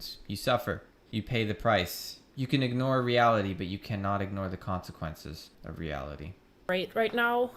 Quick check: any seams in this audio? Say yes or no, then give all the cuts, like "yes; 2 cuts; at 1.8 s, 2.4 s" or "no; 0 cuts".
yes; 3 cuts; at 0.9 s, 5.5 s, 6.7 s